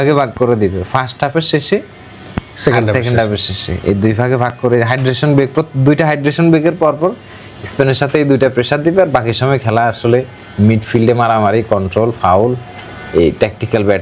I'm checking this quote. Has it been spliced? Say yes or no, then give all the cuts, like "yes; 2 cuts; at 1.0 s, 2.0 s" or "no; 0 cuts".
no; 0 cuts